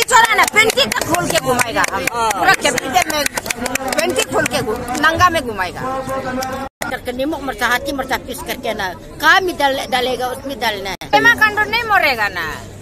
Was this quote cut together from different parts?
yes; 2 cuts; at 6.7 s, 11.1 s

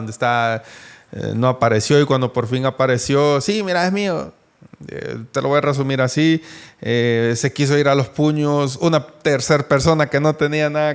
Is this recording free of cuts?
yes; 0 cuts

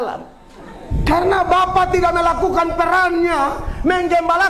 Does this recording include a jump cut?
yes; 1 cut; at 0.9 s

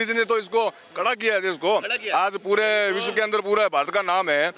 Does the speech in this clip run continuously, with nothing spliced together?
yes; 0 cuts

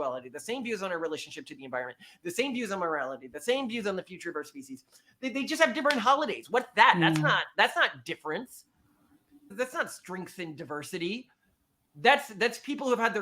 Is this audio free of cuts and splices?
no; 1 cut; at 9.5 s

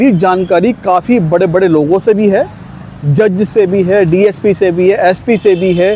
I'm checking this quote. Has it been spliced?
no; 0 cuts

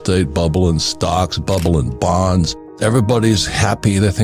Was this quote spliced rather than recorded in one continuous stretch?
yes; 1 cut; at 2.6 s

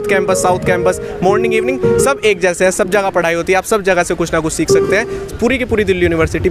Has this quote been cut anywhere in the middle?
no; 0 cuts

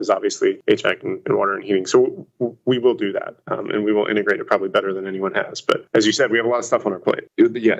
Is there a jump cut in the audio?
no; 0 cuts

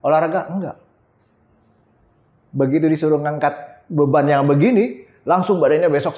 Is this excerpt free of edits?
yes; 0 cuts

